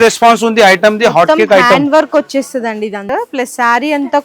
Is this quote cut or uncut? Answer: cut